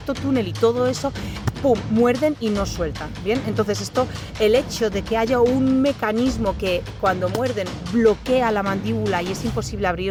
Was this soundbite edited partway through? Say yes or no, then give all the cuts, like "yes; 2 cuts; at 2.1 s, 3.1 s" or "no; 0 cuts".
no; 0 cuts